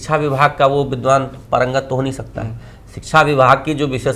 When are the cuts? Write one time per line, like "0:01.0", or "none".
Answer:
none